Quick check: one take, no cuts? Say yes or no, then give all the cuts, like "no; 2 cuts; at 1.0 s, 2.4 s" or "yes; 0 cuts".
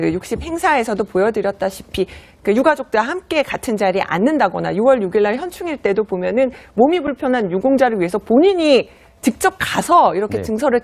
no; 1 cut; at 9.0 s